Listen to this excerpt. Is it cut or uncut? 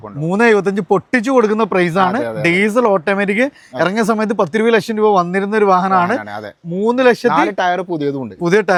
uncut